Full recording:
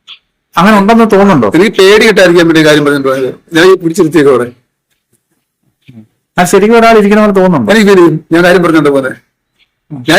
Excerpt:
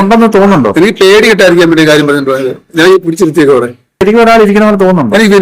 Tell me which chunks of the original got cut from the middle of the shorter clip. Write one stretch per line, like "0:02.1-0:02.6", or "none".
0:04.8-0:06.6